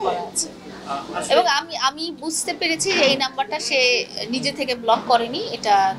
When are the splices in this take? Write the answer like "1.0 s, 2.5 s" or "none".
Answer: none